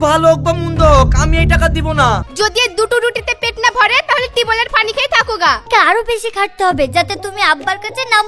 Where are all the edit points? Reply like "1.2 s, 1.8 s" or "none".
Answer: 2.3 s, 5.6 s

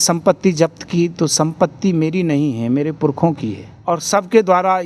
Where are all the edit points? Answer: 3.7 s

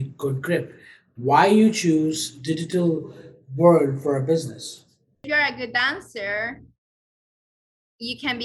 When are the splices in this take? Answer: 5.2 s

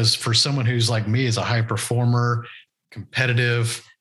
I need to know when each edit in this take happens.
none

